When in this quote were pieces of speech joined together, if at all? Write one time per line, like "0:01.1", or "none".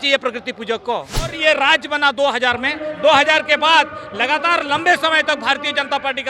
0:01.4